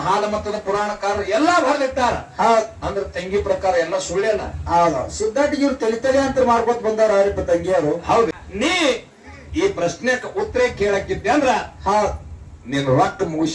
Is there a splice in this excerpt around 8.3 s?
yes; 1 cut; at 8.3 s

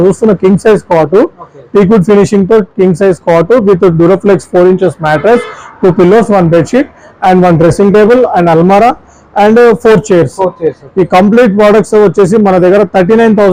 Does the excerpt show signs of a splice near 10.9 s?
no; 0 cuts

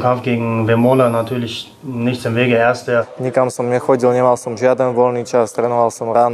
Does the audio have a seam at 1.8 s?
no; 1 cut; at 3.1 s

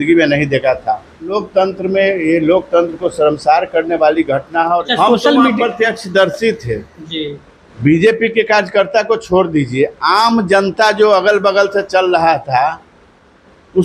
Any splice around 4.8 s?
yes; 2 cuts; at 1.4 s, 4.8 s

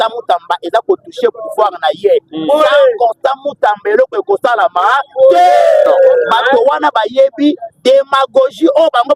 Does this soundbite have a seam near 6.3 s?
yes; 1 cut; at 6.3 s

